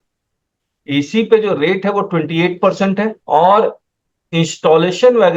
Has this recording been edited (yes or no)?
yes